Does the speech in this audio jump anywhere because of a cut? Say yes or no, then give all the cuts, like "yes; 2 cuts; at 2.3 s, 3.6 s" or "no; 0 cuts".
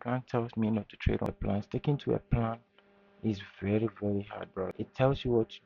yes; 2 cuts; at 1.4 s, 4.7 s